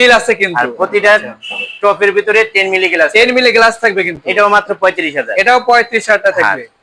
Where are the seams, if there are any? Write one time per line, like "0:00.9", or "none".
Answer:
none